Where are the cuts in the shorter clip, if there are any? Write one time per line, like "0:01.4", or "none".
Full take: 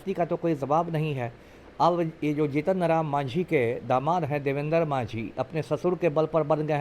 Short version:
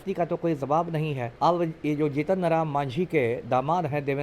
0:01.2